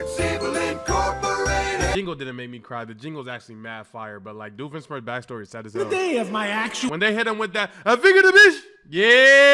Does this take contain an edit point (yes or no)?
yes